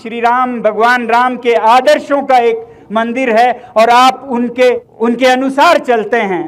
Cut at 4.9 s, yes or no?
yes